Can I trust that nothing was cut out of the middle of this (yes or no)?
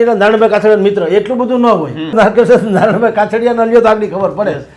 no